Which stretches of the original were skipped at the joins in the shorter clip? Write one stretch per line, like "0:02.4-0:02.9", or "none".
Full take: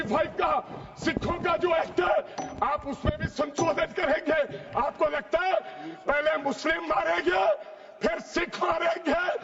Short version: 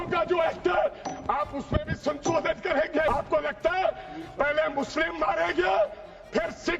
0:04.4-0:04.8